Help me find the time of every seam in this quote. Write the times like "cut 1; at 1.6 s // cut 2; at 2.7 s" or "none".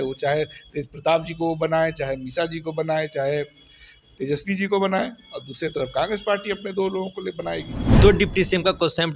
cut 1; at 8.0 s